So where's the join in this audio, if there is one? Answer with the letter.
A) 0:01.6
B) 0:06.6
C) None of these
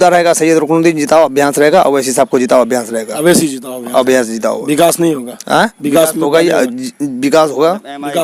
C